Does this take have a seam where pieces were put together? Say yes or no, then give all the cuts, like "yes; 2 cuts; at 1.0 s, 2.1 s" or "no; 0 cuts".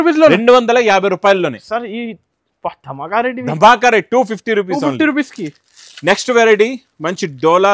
no; 0 cuts